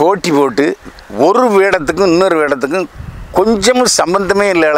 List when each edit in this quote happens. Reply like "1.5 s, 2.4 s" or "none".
none

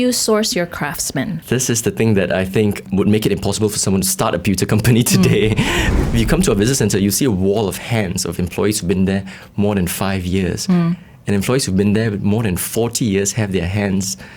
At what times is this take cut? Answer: 1.4 s, 2.9 s, 5.9 s

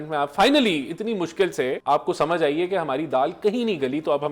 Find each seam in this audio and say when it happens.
1.8 s

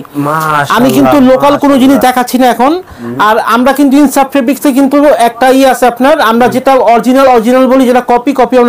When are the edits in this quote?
none

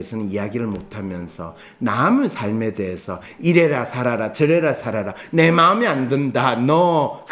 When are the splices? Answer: none

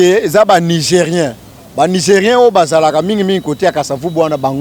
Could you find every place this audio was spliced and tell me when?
none

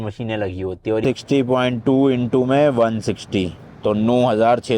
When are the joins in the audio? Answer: 1.0 s

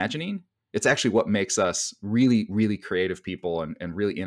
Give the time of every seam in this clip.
none

